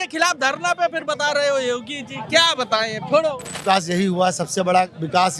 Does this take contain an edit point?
yes; 1 cut; at 3.6 s

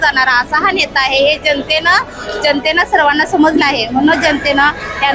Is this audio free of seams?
yes; 0 cuts

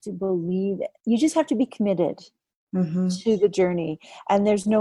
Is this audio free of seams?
no; 1 cut; at 1.0 s

